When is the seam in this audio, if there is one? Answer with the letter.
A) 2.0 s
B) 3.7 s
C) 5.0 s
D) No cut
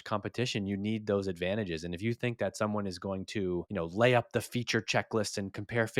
B